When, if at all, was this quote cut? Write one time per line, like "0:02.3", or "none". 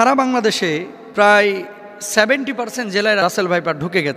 0:01.0
0:03.2